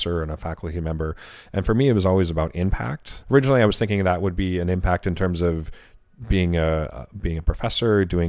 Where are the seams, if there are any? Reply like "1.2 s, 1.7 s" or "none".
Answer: 3.1 s